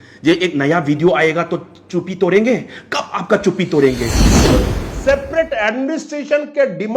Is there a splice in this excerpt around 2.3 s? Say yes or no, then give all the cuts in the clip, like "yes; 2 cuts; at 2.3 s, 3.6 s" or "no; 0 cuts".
no; 1 cut; at 4.4 s